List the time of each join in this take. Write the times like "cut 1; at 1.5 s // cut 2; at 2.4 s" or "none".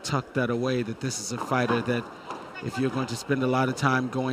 none